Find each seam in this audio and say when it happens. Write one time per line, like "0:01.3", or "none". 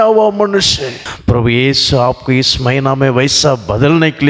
0:01.0

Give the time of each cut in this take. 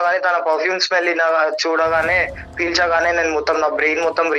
none

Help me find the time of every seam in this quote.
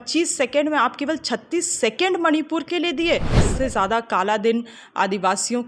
0:03.4

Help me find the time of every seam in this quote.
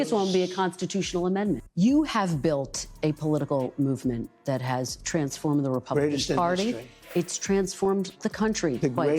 0:01.7

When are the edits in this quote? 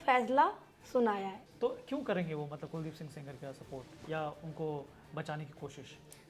0:01.4

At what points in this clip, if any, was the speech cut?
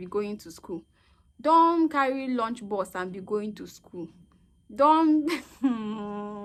none

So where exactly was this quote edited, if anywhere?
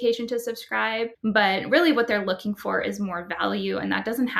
none

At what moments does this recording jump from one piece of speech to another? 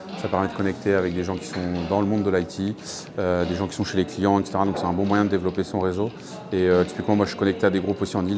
none

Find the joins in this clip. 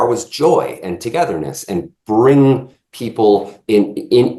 none

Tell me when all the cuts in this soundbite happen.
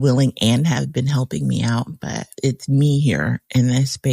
0:02.3

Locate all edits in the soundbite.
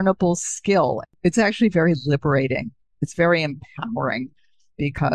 0:01.0

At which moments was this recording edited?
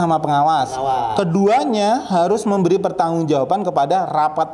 none

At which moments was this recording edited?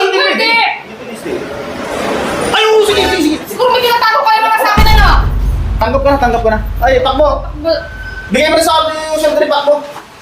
0:03.5

